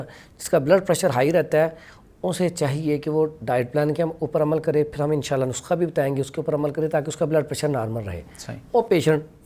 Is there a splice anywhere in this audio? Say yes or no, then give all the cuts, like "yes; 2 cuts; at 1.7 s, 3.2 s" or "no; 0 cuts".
no; 0 cuts